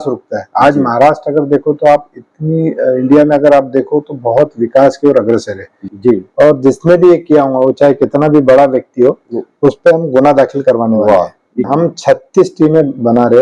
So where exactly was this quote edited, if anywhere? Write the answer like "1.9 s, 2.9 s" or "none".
5.8 s, 11.6 s